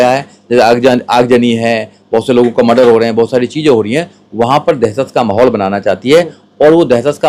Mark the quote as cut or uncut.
uncut